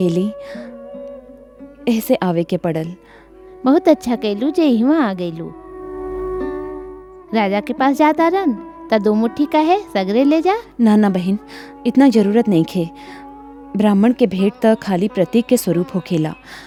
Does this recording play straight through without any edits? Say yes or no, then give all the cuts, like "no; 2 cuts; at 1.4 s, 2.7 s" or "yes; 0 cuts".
yes; 0 cuts